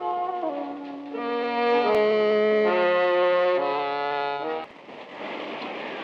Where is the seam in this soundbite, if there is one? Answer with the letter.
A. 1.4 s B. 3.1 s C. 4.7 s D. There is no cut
C